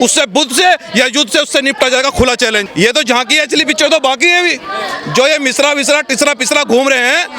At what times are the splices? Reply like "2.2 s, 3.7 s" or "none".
2.6 s